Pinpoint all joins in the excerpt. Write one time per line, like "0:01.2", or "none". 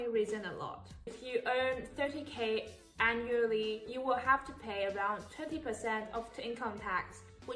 0:01.2